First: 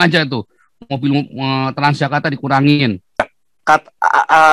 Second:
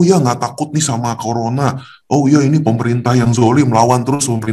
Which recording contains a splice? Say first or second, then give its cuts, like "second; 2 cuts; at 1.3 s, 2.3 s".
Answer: first; 1 cut; at 3.3 s